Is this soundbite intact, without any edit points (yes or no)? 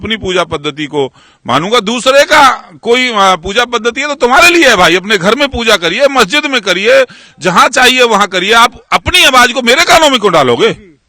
yes